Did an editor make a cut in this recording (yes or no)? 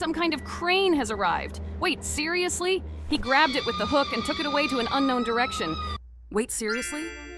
yes